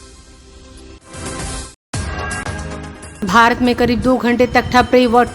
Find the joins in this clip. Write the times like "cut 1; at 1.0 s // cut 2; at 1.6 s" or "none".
cut 1; at 0.9 s